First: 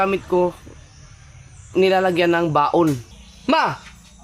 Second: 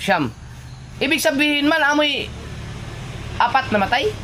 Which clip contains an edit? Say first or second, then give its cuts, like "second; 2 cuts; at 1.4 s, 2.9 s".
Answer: first; 1 cut; at 3.1 s